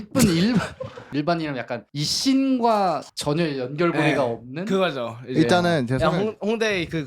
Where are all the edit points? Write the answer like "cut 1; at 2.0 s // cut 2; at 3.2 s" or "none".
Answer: cut 1; at 1.0 s